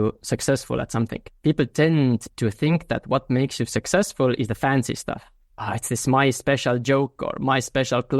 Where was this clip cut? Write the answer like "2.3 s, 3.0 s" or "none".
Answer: 1.2 s